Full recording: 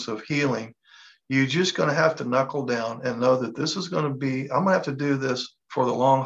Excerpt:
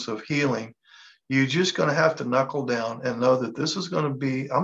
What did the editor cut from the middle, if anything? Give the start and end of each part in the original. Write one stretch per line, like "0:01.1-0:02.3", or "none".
none

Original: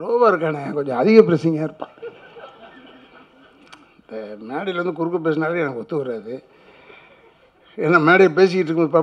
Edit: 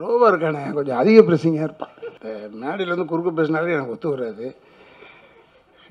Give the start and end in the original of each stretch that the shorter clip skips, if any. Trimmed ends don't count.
0:02.1-0:04.0

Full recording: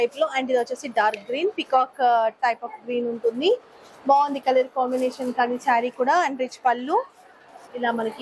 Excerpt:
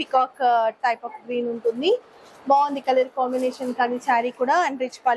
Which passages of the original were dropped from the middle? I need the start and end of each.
none

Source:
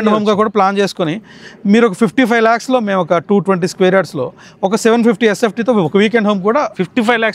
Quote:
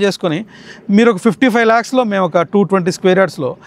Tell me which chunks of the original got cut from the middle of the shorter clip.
none

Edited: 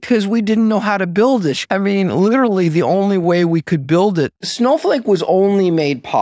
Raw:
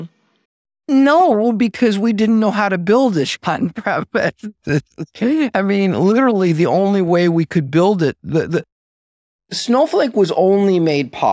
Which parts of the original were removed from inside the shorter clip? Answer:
0:03.4-0:05.5
0:08.2-0:09.5

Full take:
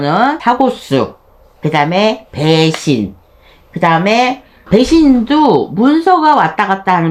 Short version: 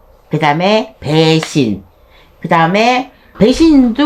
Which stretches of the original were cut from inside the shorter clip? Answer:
none

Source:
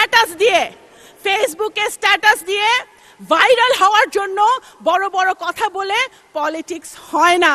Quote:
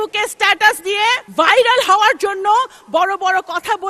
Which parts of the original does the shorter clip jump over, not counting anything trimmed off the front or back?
0:02.9-0:03.2

